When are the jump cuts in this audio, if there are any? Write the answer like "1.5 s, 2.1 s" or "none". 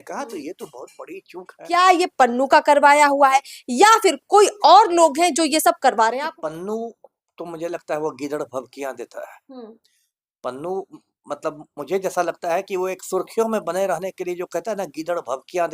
1.6 s, 6.2 s